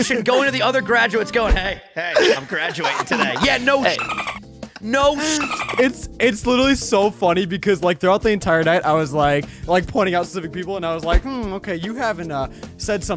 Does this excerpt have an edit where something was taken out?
yes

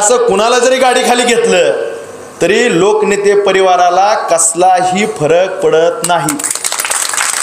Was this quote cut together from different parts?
no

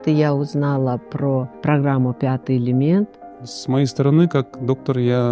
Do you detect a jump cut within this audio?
yes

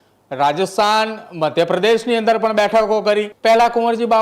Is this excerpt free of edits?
no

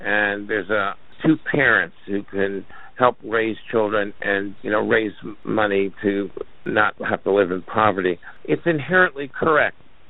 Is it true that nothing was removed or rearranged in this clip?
no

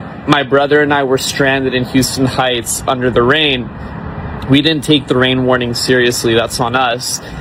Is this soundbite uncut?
yes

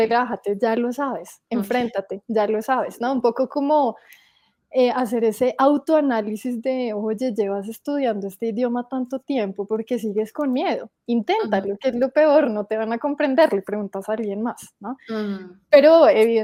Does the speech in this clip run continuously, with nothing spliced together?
yes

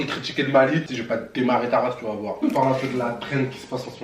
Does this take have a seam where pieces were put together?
yes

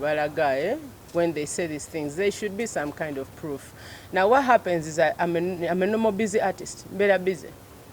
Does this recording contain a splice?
no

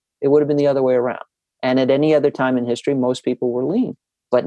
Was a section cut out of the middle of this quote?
no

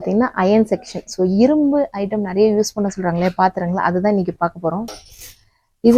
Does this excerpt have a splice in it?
no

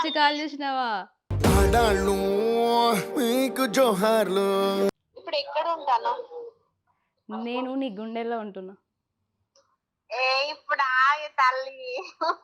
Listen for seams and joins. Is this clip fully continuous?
no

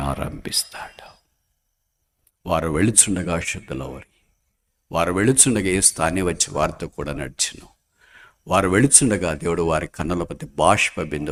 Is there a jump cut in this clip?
no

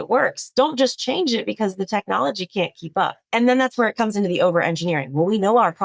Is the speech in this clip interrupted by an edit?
yes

